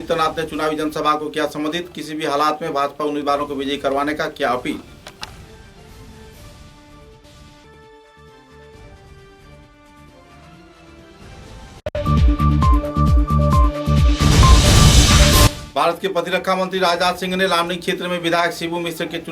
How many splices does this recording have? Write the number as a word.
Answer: two